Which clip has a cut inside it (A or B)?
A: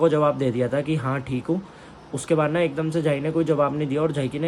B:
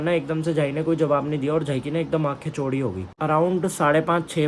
B